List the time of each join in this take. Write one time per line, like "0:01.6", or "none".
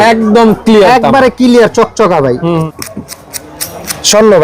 0:02.7